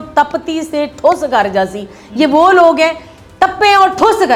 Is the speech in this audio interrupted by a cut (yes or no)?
no